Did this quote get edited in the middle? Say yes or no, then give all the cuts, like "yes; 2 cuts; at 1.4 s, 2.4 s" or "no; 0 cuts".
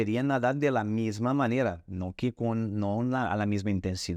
no; 0 cuts